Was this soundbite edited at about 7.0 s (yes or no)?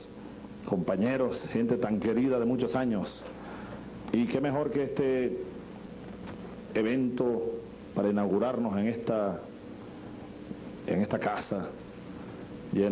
no